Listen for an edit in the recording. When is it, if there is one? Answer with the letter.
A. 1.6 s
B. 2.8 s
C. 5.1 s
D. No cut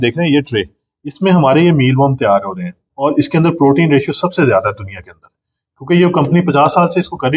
B